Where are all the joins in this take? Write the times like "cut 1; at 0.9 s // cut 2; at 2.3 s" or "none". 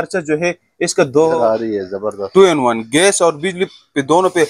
cut 1; at 1.4 s